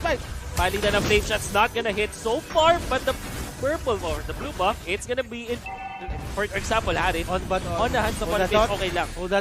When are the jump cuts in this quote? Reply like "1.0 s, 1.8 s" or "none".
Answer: 5.6 s